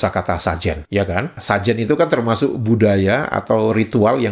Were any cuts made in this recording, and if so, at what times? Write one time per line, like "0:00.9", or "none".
none